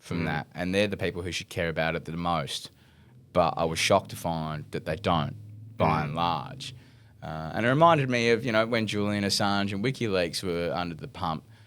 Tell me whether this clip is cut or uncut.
uncut